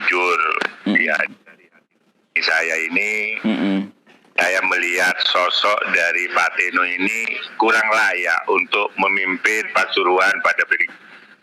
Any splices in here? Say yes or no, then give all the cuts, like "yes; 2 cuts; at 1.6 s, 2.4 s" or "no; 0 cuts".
no; 0 cuts